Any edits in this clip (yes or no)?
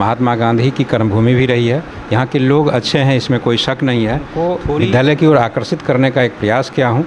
yes